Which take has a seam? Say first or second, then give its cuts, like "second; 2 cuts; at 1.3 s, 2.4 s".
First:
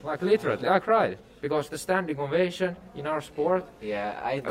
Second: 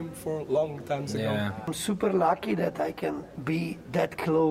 second; 2 cuts; at 1.7 s, 3.3 s